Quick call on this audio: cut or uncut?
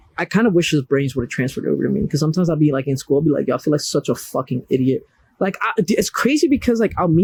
uncut